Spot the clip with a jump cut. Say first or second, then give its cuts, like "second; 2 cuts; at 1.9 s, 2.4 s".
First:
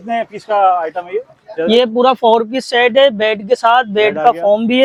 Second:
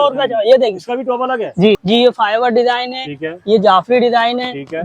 second; 1 cut; at 1.8 s